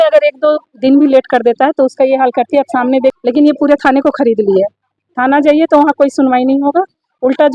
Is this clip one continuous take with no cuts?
no; 1 cut; at 3.1 s

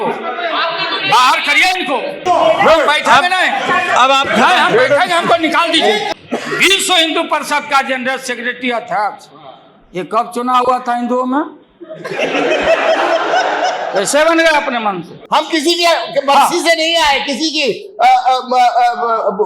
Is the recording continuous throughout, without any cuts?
no; 3 cuts; at 2.2 s, 6.1 s, 15.1 s

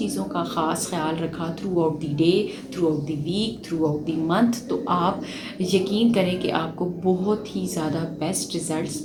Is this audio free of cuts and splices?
yes; 0 cuts

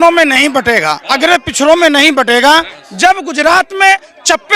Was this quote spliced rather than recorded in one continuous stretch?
yes; 1 cut; at 2.8 s

